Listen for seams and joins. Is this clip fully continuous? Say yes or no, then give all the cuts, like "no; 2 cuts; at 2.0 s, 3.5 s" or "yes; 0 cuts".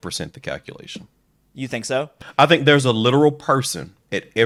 yes; 0 cuts